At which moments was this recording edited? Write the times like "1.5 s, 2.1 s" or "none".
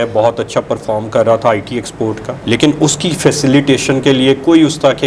none

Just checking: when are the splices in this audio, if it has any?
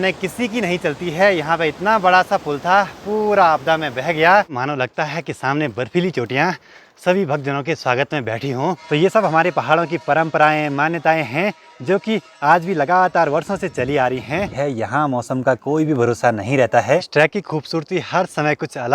4.5 s, 8.8 s, 14.5 s, 17.1 s

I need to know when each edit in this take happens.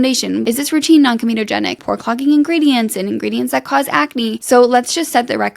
1.8 s

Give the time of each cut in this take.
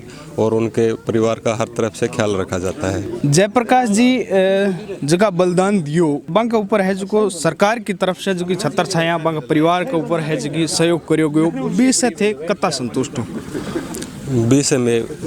none

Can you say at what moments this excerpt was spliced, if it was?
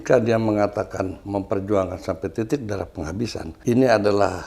1.2 s, 3.5 s

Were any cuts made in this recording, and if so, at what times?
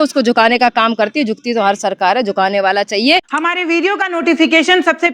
3.3 s

